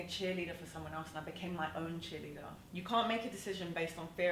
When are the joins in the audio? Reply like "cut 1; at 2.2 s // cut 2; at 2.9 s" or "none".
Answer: cut 1; at 2.6 s